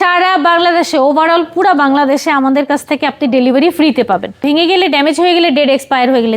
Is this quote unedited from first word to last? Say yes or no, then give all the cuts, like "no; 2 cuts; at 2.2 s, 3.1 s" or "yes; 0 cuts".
no; 1 cut; at 4.4 s